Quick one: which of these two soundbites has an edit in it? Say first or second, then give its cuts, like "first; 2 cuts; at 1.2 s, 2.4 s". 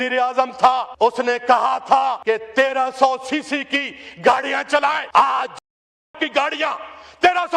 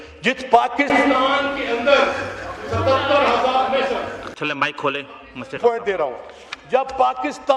first; 3 cuts; at 0.9 s, 2.2 s, 5.0 s